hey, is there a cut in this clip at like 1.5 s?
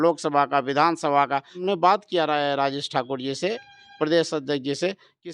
yes; 1 cut; at 1.5 s

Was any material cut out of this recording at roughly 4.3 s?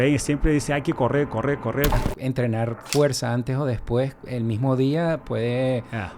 no; 1 cut; at 1.9 s

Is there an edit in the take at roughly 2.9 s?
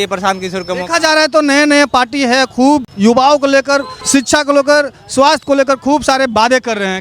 yes; 2 cuts; at 2.9 s, 4.0 s

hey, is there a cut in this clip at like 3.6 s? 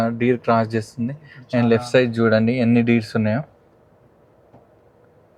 no; 0 cuts

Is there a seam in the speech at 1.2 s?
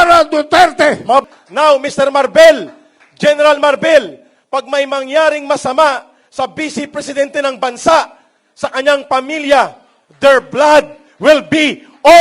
yes; 1 cut; at 1.2 s

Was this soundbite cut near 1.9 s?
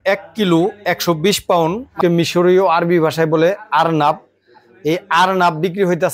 yes; 1 cut; at 1.9 s

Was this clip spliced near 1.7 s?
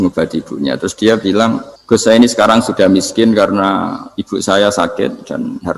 yes; 1 cut; at 1.7 s

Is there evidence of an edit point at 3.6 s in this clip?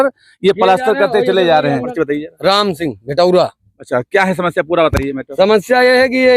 no; 1 cut; at 1.9 s

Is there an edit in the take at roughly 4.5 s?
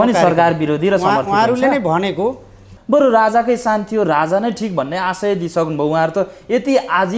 no; 1 cut; at 2.7 s

